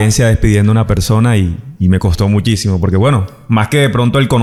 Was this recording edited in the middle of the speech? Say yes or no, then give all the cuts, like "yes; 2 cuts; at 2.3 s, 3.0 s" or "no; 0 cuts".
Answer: no; 0 cuts